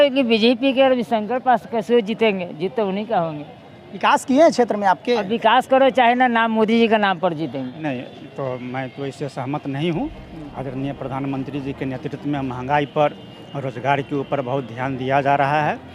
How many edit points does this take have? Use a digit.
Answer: 1